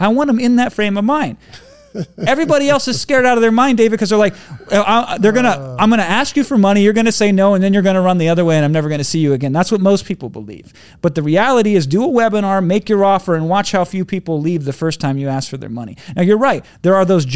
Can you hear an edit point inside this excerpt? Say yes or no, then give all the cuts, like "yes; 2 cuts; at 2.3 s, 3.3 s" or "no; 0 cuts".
no; 0 cuts